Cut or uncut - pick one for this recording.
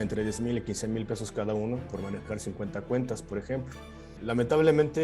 cut